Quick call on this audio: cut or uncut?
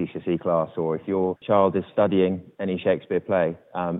cut